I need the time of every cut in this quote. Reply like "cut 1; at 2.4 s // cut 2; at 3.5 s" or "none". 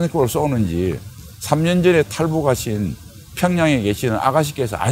none